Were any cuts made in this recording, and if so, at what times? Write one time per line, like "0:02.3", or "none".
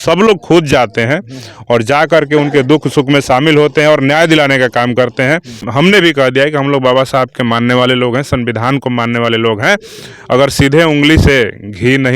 0:05.6